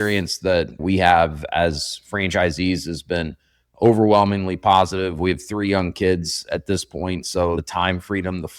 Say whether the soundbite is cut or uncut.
uncut